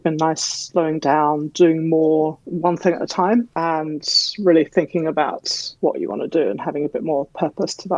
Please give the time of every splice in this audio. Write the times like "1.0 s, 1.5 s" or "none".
none